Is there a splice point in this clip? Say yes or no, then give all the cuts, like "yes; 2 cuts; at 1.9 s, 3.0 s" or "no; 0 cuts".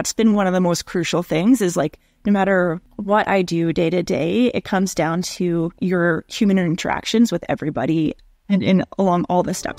yes; 3 cuts; at 2.9 s, 5.7 s, 8.2 s